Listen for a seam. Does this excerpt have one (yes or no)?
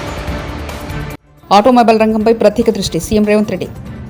no